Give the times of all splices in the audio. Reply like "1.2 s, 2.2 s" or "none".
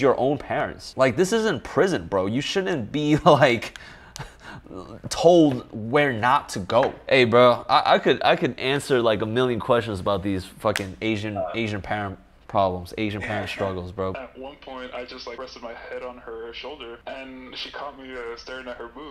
14.1 s, 15.4 s, 17.0 s